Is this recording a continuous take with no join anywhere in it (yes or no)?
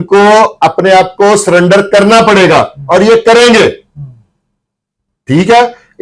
yes